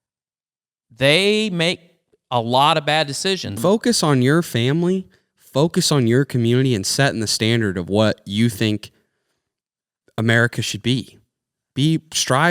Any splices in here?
yes; 1 cut; at 3.6 s

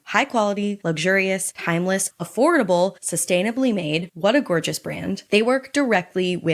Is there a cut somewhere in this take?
yes; 1 cut; at 5.2 s

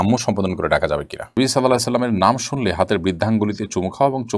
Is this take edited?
yes; 1 cut; at 1.4 s

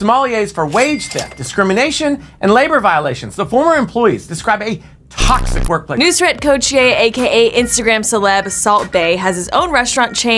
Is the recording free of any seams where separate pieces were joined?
no; 1 cut; at 5.9 s

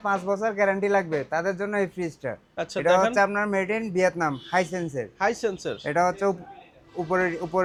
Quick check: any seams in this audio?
no; 0 cuts

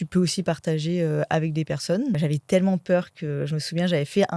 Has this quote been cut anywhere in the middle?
yes; 1 cut; at 2.2 s

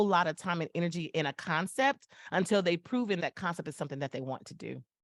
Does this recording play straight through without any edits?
no; 1 cut; at 3.2 s

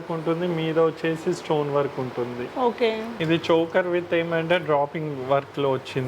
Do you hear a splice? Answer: yes; 1 cut; at 3.1 s

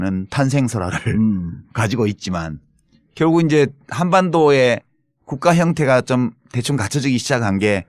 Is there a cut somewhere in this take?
yes; 1 cut; at 2.4 s

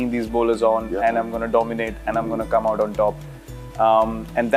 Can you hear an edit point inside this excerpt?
no; 0 cuts

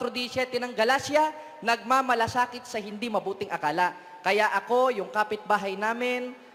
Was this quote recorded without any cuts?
yes; 0 cuts

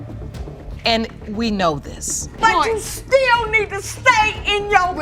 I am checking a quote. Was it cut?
yes; 1 cut; at 2.3 s

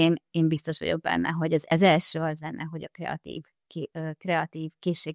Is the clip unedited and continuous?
no; 1 cut; at 1.6 s

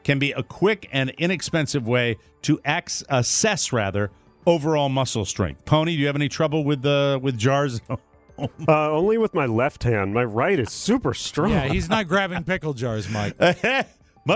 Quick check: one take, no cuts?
yes; 0 cuts

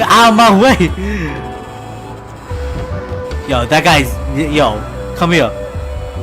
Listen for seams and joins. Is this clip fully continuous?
yes; 0 cuts

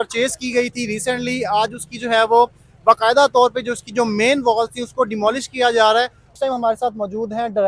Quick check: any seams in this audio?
yes; 1 cut; at 6.3 s

